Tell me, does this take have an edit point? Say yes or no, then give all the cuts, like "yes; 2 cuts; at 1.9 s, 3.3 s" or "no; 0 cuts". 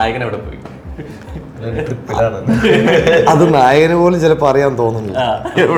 no; 0 cuts